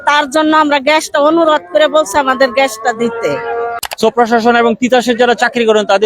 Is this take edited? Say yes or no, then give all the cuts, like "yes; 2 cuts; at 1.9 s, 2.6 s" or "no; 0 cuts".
yes; 1 cut; at 3.8 s